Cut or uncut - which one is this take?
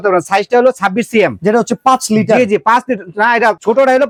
uncut